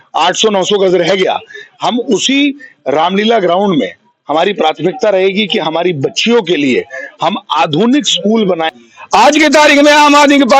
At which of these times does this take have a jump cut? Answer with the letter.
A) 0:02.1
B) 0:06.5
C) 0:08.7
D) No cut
C